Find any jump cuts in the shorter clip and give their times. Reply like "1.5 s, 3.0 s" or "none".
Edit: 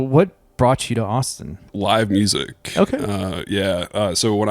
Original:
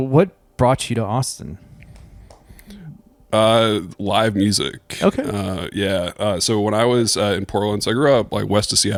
1.7 s